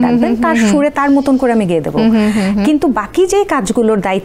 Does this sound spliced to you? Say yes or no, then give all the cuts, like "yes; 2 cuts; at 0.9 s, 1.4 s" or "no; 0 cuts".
no; 0 cuts